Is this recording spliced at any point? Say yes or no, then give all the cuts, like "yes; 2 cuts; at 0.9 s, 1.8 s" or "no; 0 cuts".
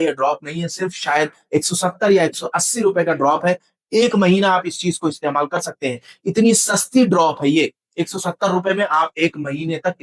no; 0 cuts